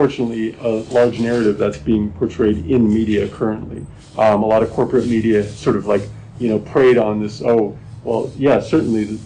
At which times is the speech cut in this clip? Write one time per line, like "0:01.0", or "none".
none